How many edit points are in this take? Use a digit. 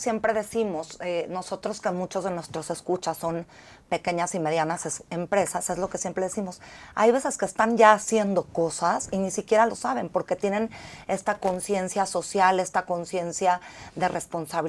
0